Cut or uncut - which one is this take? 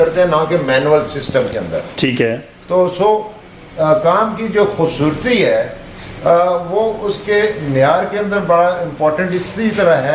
uncut